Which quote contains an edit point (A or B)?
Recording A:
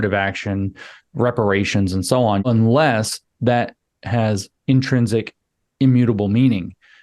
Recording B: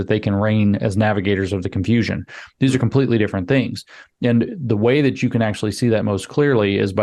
A